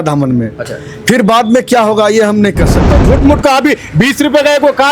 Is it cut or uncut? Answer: cut